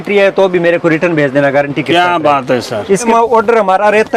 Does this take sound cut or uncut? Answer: cut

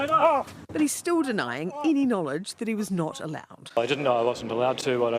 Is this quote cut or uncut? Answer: cut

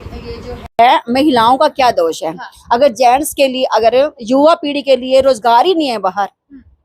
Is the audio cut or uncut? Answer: uncut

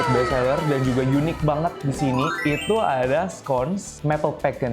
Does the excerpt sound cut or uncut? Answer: cut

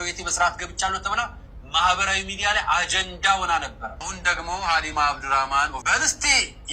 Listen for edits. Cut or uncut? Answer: cut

